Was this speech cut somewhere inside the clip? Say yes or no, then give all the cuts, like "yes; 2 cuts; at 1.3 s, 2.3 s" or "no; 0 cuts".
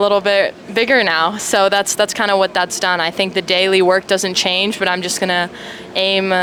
no; 0 cuts